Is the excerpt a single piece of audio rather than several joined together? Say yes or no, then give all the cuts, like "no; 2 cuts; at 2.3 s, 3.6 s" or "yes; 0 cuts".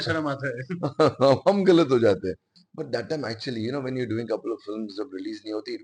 no; 1 cut; at 2.6 s